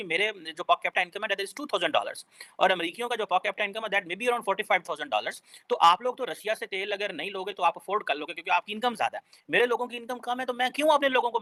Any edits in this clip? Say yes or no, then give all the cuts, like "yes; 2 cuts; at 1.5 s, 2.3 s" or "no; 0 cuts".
no; 0 cuts